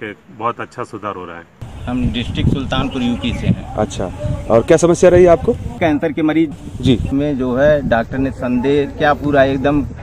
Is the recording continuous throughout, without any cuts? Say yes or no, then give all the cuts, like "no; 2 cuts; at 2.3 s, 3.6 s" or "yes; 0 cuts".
yes; 0 cuts